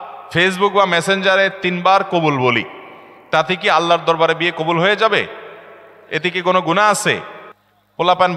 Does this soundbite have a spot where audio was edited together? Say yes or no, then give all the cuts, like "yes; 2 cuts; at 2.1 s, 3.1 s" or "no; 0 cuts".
no; 0 cuts